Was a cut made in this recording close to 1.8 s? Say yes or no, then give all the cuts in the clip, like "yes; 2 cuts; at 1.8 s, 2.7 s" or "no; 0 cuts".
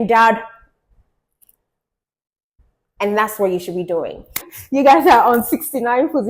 no; 1 cut; at 4.5 s